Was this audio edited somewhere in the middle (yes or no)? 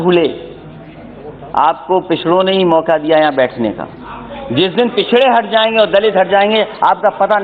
no